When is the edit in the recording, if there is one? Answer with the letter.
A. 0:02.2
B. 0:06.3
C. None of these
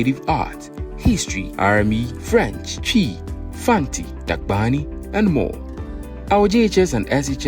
A